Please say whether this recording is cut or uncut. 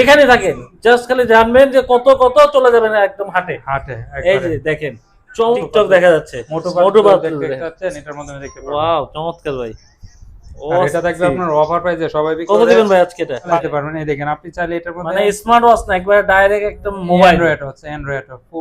cut